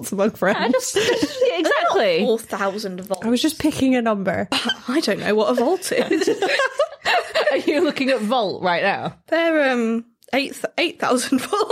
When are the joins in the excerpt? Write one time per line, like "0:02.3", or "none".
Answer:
0:04.6